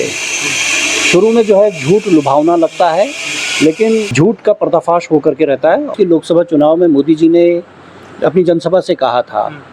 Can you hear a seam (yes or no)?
yes